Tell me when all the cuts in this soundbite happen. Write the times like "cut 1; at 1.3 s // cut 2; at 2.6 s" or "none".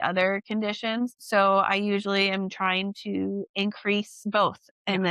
cut 1; at 4.2 s